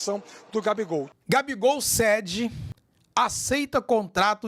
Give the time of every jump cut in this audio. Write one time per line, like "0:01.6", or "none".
0:01.1
0:02.7